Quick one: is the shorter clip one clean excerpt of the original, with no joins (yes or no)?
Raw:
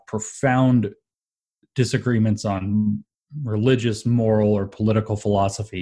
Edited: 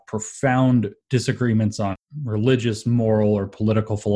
no